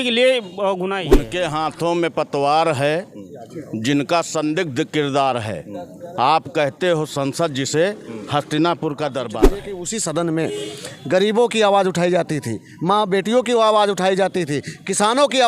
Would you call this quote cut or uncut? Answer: cut